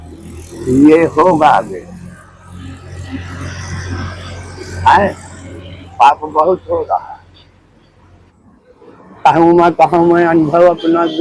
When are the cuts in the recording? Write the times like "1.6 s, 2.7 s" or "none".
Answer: 8.2 s